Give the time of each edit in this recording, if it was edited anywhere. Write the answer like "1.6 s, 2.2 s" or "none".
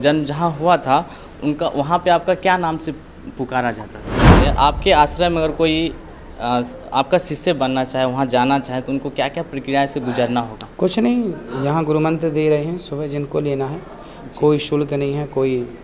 4.5 s